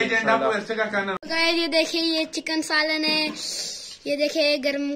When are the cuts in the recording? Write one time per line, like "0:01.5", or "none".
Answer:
0:01.2